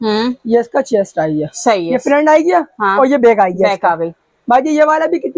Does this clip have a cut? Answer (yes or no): no